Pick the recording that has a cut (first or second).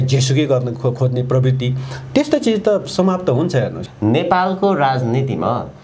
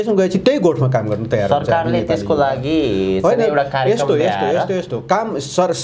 first